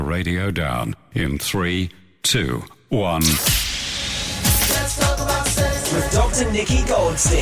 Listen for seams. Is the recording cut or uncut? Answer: cut